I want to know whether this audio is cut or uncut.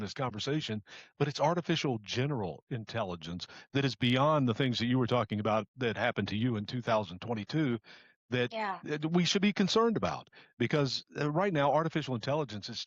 uncut